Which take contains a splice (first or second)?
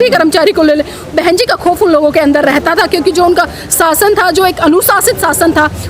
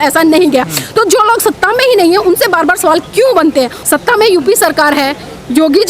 second